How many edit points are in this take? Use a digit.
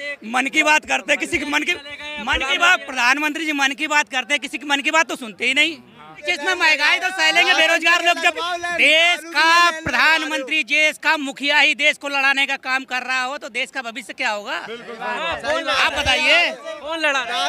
1